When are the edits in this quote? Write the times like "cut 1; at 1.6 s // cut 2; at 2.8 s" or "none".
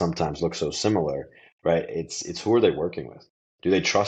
none